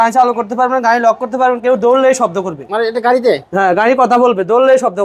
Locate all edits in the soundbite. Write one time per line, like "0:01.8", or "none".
none